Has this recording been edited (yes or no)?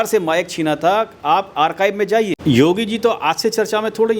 yes